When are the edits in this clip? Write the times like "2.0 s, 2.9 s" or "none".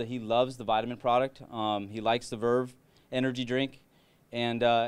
none